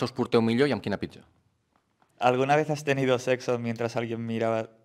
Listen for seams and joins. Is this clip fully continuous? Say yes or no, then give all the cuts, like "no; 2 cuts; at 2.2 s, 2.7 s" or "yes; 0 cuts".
no; 1 cut; at 2.0 s